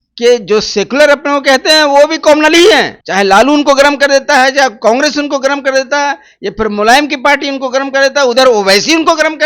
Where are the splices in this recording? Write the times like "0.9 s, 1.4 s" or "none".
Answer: 3.0 s